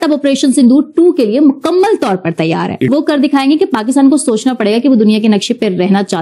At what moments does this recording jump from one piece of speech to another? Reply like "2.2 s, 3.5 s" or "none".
2.9 s